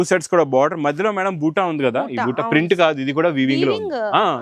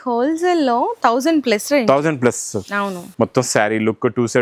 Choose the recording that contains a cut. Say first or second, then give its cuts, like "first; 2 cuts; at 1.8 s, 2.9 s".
second; 1 cut; at 3.1 s